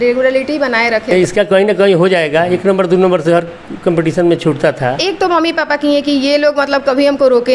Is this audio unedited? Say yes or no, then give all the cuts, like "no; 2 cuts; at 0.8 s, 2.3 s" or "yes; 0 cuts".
no; 2 cuts; at 1.1 s, 5.0 s